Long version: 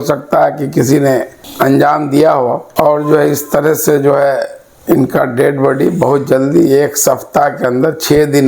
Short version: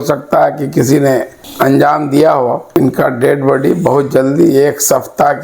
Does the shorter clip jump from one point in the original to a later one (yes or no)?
yes